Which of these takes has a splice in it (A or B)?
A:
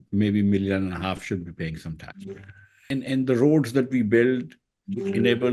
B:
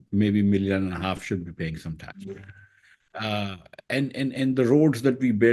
A